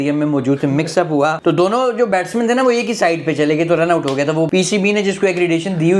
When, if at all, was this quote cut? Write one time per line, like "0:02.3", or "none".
0:01.4
0:04.5